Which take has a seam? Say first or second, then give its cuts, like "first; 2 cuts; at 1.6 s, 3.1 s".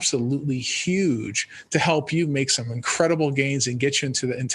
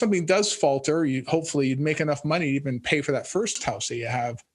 second; 1 cut; at 3.6 s